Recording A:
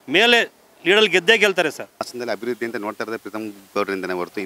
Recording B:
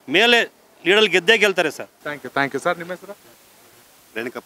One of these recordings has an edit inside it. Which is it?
A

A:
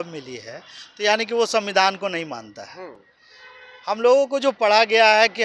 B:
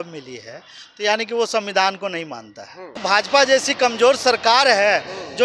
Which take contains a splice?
B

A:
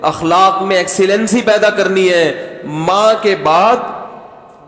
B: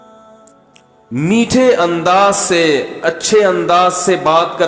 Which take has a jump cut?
B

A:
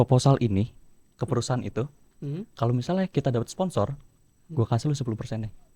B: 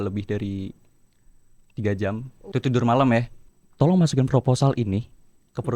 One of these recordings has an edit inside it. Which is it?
B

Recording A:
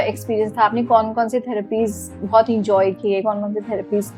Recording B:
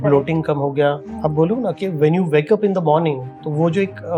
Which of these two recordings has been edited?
B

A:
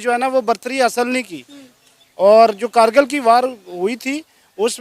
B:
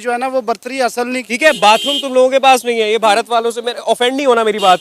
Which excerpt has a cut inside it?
B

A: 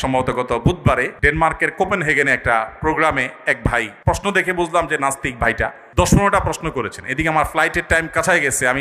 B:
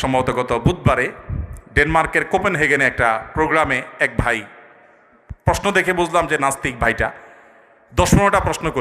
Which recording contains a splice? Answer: A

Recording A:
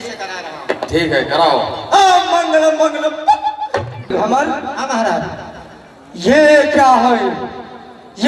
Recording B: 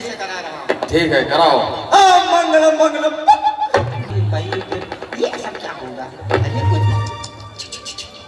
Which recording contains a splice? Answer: A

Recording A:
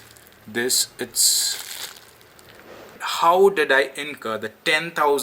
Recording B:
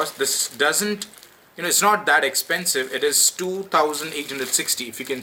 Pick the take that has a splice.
A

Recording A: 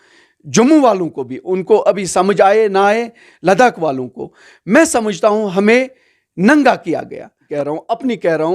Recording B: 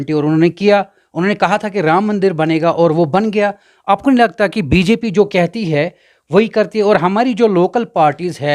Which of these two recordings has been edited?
A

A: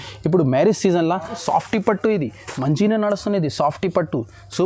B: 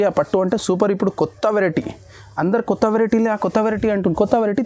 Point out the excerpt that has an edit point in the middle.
A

